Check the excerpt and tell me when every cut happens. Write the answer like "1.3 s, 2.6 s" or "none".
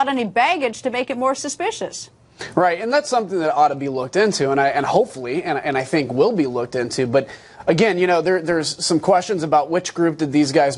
none